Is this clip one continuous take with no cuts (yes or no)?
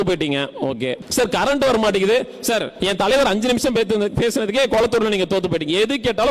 no